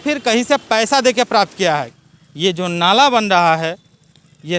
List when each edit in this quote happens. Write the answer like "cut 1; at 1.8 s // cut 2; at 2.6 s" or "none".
cut 1; at 1.9 s